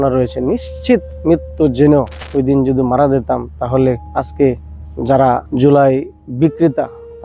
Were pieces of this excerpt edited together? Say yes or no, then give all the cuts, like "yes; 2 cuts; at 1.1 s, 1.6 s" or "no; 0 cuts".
yes; 3 cuts; at 2.2 s, 4.0 s, 5.5 s